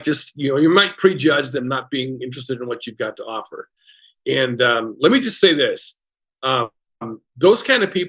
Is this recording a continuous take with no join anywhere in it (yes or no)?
yes